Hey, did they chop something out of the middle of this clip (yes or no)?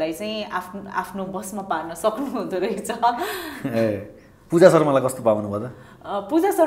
no